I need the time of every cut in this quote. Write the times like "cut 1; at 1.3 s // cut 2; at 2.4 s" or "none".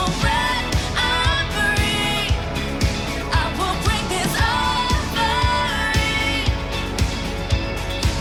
none